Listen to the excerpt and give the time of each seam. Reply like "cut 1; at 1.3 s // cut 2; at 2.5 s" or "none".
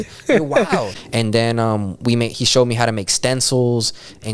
cut 1; at 0.9 s